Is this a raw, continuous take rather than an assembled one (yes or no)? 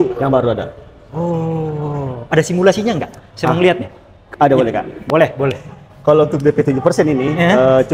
yes